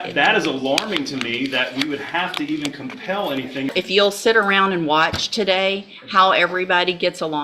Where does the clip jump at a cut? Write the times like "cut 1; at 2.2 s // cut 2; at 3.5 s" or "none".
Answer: cut 1; at 3.7 s